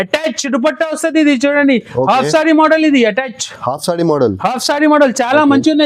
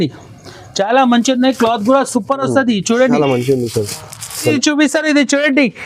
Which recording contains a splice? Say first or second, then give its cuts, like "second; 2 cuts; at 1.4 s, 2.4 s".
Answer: second; 1 cut; at 4.5 s